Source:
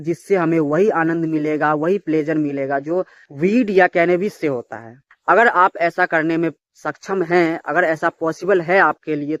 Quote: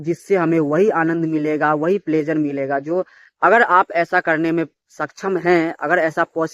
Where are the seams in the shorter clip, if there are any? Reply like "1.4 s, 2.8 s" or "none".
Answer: 3.2 s